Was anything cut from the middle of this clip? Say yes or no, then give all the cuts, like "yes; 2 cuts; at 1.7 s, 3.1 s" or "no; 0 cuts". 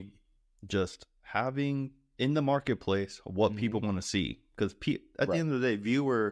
no; 0 cuts